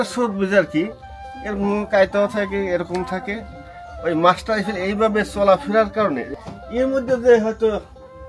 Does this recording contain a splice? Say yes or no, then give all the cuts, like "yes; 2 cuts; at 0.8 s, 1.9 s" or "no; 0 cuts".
yes; 1 cut; at 6.3 s